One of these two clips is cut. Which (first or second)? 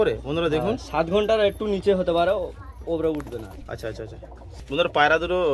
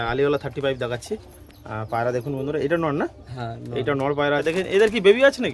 second